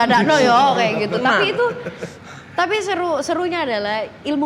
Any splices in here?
no; 0 cuts

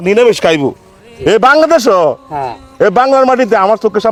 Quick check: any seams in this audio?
no; 0 cuts

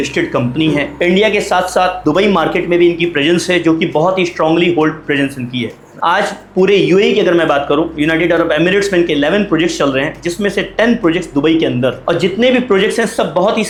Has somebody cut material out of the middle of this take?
no; 0 cuts

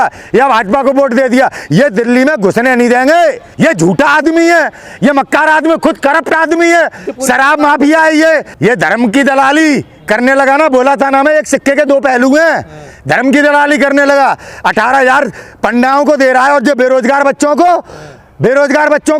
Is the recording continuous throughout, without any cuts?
no; 3 cuts; at 3.4 s, 7.1 s, 8.5 s

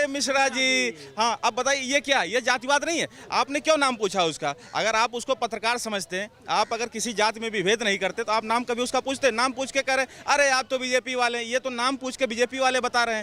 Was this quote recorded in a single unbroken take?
yes; 0 cuts

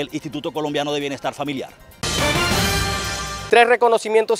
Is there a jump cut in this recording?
yes; 2 cuts; at 2.0 s, 3.3 s

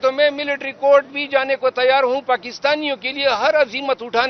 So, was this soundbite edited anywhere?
no; 0 cuts

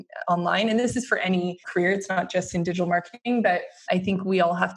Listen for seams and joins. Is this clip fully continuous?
no; 2 cuts; at 1.6 s, 3.8 s

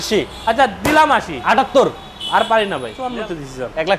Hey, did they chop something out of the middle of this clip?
yes; 1 cut; at 3.0 s

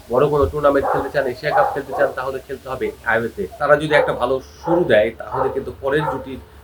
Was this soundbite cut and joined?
yes; 1 cut; at 3.6 s

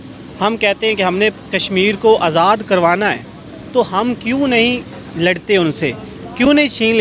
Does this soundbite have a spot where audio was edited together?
no; 0 cuts

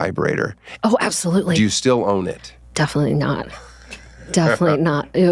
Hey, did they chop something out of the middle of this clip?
no; 0 cuts

